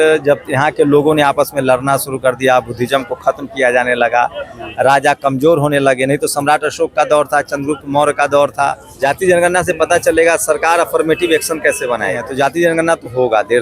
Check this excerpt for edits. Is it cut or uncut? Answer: cut